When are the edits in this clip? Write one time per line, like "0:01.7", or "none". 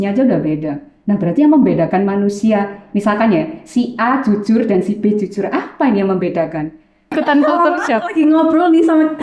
0:07.1